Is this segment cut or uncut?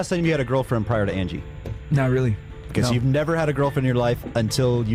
uncut